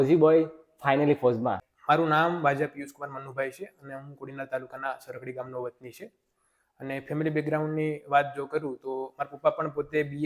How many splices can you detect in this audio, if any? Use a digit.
1